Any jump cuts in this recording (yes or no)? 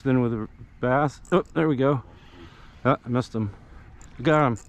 no